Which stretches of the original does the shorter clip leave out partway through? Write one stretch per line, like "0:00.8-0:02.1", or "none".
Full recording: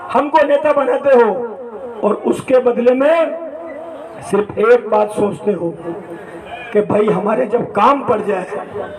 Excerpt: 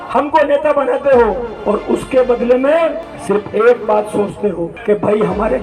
0:01.5-0:01.9
0:03.5-0:04.1
0:05.8-0:06.6